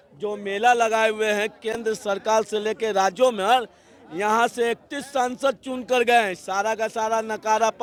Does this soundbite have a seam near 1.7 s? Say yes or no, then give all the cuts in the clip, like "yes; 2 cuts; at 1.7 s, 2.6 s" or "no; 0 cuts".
no; 0 cuts